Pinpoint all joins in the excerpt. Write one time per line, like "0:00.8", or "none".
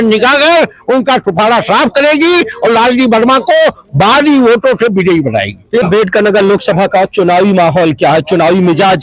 0:05.8